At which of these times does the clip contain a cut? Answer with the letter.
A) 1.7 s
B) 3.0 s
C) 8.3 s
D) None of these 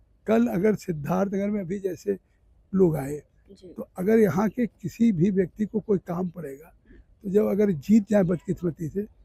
D